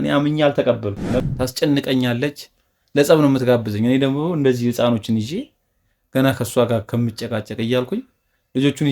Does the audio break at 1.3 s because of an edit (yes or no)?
yes